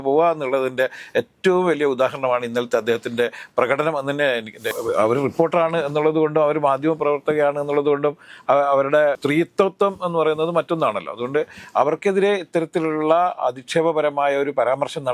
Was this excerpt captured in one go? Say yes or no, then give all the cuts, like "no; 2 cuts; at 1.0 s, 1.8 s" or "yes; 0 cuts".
no; 2 cuts; at 4.7 s, 9.2 s